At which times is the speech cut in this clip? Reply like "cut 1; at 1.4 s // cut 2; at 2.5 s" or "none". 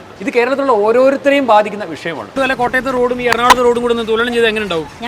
cut 1; at 2.3 s